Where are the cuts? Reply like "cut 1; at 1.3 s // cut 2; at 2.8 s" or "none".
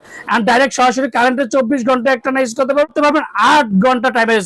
cut 1; at 2.9 s